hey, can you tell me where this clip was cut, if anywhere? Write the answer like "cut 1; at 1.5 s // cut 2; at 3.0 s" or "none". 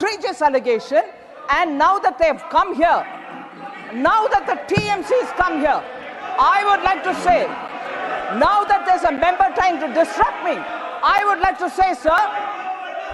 none